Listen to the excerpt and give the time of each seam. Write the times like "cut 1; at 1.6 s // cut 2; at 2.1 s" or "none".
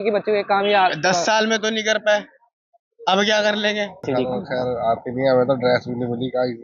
cut 1; at 4.0 s